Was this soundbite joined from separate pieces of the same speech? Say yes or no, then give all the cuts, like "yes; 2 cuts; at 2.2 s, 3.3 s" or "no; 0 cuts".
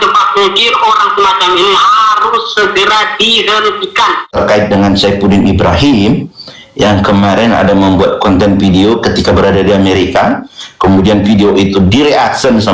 yes; 1 cut; at 4.3 s